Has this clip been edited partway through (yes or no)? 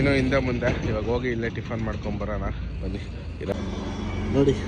yes